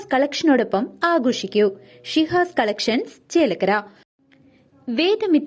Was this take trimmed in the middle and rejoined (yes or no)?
yes